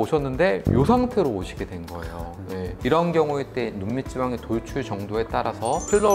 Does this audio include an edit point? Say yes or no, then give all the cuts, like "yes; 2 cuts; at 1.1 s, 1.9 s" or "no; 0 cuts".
yes; 1 cut; at 2.8 s